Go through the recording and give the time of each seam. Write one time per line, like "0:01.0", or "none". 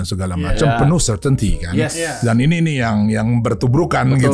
none